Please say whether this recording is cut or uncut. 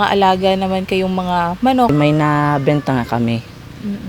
cut